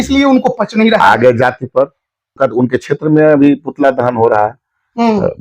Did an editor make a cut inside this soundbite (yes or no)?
yes